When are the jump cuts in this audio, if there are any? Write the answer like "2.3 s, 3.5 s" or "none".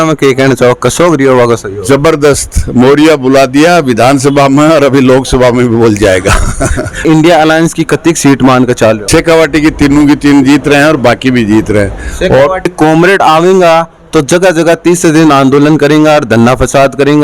7.0 s, 9.0 s, 12.7 s